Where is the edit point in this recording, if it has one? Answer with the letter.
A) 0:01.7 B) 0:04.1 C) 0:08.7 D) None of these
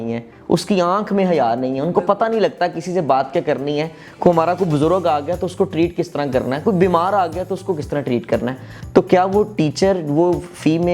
C